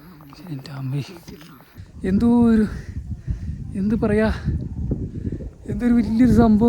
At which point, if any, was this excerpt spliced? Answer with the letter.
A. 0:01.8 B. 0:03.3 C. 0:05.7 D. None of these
A